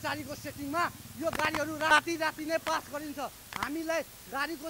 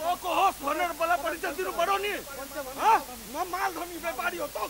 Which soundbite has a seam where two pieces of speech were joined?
first; 1 cut; at 1.9 s

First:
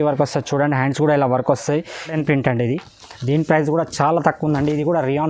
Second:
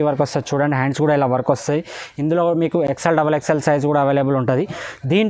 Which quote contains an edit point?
first; 1 cut; at 2.1 s

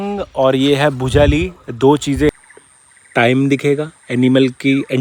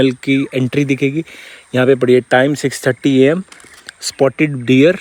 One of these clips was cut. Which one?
first; 1 cut; at 2.3 s

